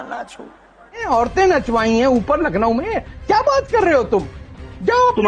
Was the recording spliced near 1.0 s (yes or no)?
yes